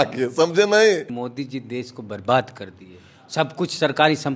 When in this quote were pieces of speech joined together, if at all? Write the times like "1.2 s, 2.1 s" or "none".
1.2 s